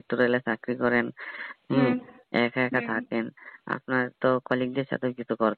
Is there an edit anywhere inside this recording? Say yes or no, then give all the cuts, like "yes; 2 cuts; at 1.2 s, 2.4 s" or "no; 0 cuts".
no; 0 cuts